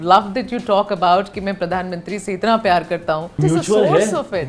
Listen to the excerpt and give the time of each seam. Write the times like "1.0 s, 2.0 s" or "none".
3.4 s